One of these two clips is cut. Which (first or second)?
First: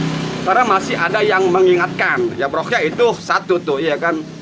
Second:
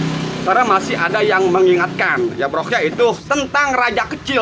second